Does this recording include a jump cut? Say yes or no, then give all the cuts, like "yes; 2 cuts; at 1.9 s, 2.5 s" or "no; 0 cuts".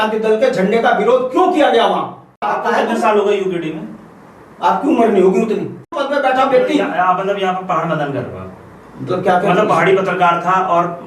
yes; 2 cuts; at 2.5 s, 6.0 s